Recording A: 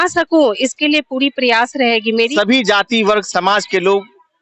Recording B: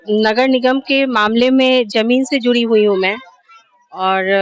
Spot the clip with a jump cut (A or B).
A